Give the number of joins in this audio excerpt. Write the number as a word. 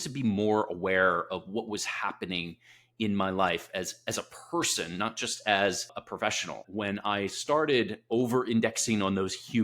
one